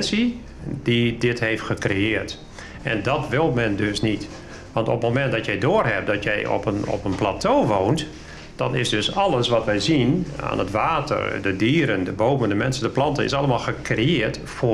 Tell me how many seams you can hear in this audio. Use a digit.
0